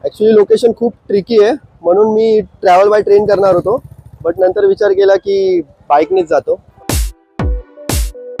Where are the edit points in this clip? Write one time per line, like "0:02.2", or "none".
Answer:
0:06.7